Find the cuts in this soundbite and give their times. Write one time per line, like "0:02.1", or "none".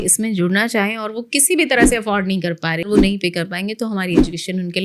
0:02.9